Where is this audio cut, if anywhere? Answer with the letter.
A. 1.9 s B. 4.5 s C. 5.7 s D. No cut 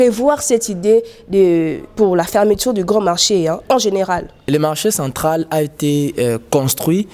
B